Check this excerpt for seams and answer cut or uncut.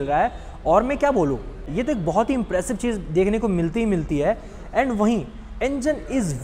uncut